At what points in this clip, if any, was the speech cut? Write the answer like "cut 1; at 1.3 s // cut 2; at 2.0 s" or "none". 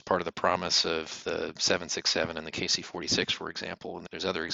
none